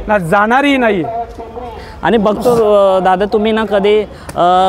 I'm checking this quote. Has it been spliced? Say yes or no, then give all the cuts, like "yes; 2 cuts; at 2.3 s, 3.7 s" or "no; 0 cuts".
no; 0 cuts